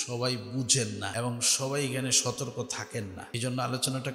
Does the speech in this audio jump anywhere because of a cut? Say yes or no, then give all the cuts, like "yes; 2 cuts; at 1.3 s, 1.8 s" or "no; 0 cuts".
yes; 2 cuts; at 1.1 s, 3.2 s